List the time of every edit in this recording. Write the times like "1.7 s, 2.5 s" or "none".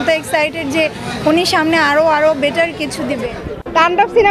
3.0 s